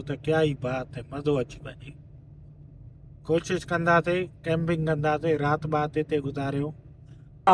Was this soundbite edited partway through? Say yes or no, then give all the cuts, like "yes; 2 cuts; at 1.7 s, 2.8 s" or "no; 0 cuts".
no; 0 cuts